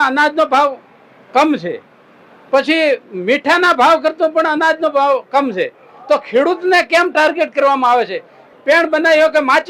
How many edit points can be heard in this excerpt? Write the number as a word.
one